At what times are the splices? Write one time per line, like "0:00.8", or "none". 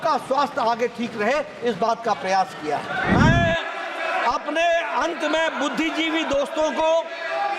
0:03.0